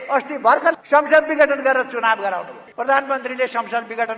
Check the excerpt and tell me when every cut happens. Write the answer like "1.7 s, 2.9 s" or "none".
0.8 s, 2.6 s